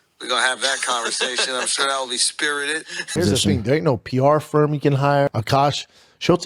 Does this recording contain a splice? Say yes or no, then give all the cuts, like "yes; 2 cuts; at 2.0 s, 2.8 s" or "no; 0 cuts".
yes; 2 cuts; at 3.1 s, 5.3 s